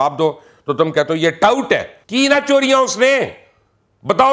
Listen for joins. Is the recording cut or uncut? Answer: cut